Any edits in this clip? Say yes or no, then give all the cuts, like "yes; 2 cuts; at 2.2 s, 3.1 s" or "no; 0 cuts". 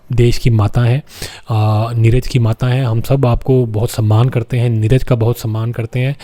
no; 0 cuts